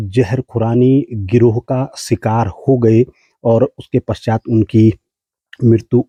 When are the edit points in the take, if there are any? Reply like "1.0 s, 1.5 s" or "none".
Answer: none